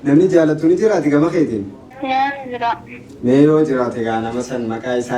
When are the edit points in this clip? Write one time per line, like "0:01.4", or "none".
0:01.8